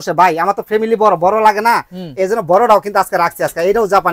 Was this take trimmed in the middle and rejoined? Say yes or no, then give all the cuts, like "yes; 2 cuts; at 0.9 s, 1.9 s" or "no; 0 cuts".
no; 0 cuts